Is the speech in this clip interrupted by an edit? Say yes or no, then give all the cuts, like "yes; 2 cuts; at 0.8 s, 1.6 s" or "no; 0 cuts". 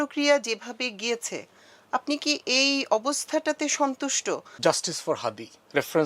yes; 1 cut; at 4.5 s